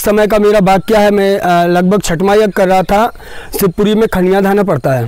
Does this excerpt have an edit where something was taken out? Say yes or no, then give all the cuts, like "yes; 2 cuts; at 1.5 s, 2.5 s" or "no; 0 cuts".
no; 0 cuts